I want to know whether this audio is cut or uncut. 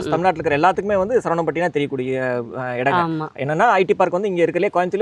uncut